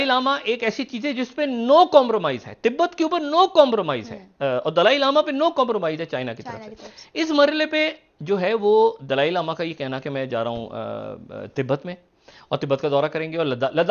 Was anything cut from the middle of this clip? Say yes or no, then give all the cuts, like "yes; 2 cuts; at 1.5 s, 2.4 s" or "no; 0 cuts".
no; 0 cuts